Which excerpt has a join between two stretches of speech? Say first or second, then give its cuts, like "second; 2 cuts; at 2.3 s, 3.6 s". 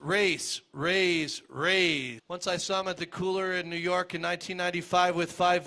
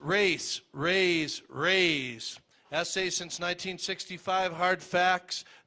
second; 1 cut; at 2.2 s